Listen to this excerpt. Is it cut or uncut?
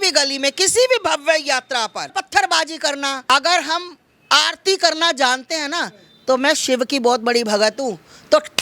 cut